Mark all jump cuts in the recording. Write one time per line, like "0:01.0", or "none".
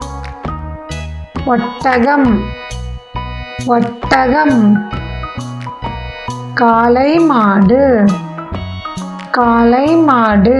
none